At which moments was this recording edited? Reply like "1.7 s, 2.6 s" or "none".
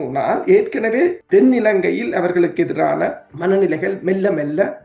1.2 s, 3.3 s